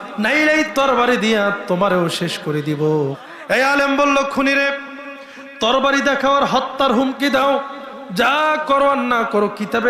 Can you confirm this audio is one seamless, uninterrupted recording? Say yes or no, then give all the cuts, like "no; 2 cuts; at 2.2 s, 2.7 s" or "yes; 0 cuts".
no; 1 cut; at 3.3 s